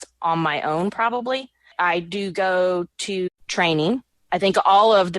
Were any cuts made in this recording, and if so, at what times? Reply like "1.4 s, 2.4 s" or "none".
1.7 s, 3.3 s, 4.1 s